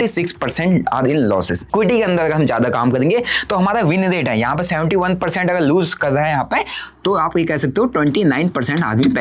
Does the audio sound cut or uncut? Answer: cut